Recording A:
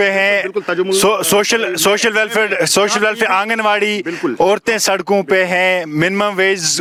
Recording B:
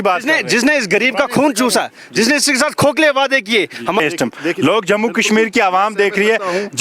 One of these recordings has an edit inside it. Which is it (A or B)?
B